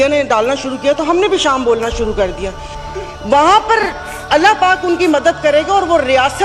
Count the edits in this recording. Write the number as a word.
zero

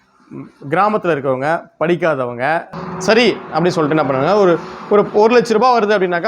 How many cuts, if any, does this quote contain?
one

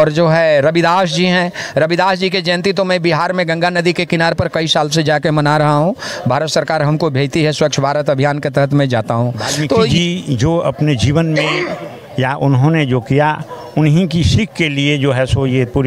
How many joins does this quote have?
one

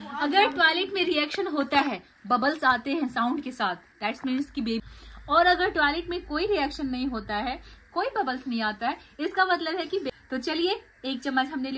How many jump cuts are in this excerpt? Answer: two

